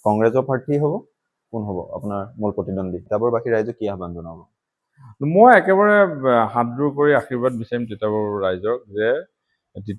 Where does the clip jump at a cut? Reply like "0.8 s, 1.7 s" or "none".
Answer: 3.0 s